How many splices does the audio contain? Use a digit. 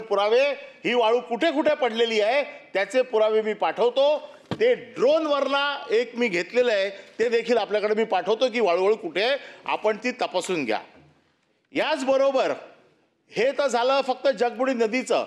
0